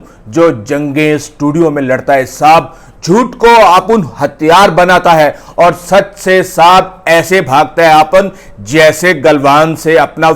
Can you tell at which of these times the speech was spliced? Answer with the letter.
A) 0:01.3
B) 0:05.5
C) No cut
C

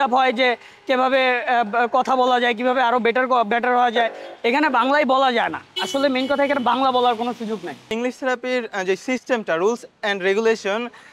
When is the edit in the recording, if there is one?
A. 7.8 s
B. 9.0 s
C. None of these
A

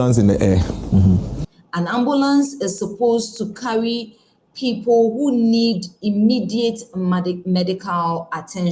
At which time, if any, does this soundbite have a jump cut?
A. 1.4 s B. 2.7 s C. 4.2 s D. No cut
A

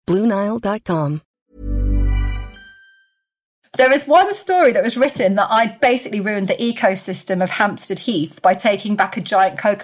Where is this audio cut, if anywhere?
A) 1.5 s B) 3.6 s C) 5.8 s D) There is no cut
B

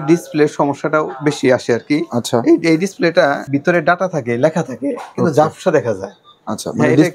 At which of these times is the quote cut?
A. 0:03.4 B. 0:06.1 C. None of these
A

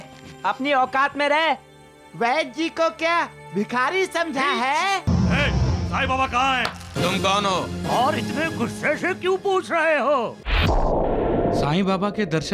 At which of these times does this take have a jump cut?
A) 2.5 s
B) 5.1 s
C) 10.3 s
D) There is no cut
B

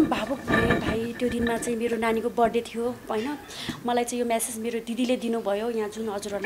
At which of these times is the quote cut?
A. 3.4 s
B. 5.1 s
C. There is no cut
C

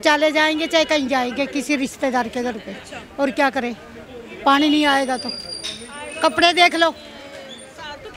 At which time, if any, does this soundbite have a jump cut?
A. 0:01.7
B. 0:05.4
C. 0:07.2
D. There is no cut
D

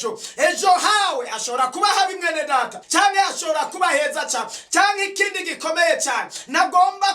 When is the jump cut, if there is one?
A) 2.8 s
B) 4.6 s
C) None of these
A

